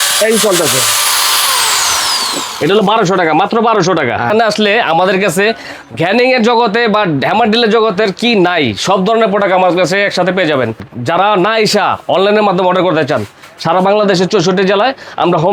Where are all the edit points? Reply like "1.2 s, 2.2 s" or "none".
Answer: 4.3 s, 10.9 s